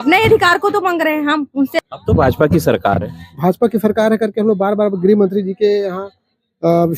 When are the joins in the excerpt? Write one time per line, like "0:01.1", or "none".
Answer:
0:01.7